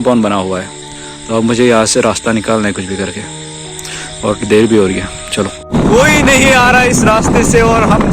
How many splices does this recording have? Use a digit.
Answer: 1